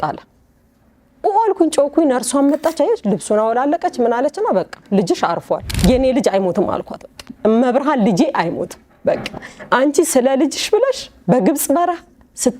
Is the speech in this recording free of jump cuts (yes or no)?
no